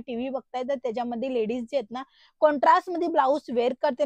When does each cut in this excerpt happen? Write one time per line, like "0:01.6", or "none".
none